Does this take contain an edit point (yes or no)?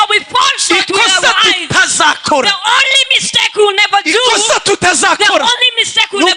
no